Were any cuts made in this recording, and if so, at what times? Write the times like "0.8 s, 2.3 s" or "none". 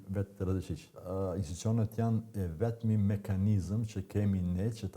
1.0 s